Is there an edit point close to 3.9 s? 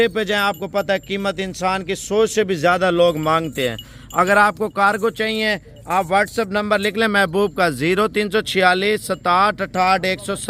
no; 0 cuts

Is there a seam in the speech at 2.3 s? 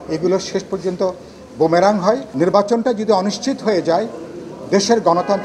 yes; 1 cut; at 2.3 s

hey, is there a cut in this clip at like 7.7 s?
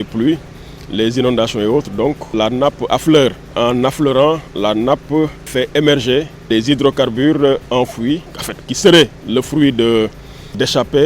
no; 4 cuts; at 2.3 s, 3.5 s, 5.5 s, 6.5 s

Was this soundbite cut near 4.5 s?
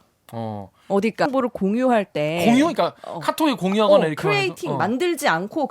no; 1 cut; at 1.3 s

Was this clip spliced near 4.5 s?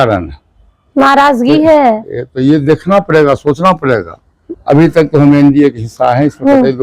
yes; 1 cut; at 4.5 s

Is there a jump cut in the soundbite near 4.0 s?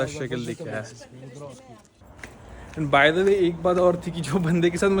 no; 1 cut; at 2.0 s

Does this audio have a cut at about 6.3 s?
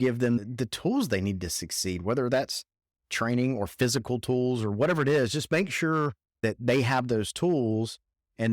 yes; 1 cut; at 6.3 s

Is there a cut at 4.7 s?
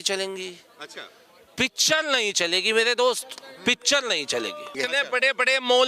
yes; 1 cut; at 4.7 s

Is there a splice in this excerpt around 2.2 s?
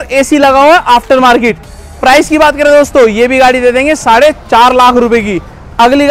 no; 0 cuts

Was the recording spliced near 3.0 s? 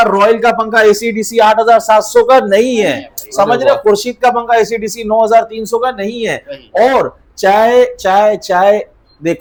no; 0 cuts

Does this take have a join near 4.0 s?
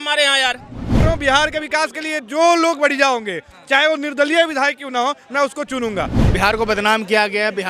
no; 2 cuts; at 1.0 s, 6.1 s

